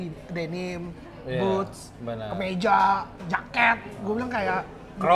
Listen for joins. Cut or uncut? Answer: uncut